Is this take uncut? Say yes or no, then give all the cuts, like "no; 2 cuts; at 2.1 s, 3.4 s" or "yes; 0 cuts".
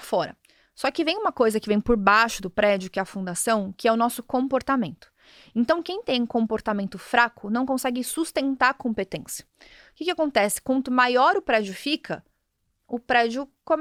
yes; 0 cuts